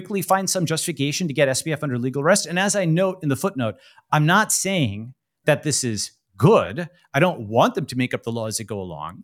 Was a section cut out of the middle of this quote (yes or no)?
no